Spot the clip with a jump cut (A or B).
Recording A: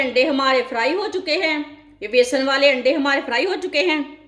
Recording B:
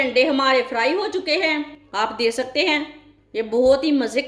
B